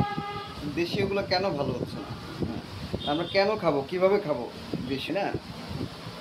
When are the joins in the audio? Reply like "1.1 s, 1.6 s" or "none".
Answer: 5.0 s